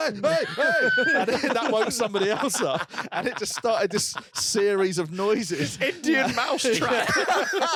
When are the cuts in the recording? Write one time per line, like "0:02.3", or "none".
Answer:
none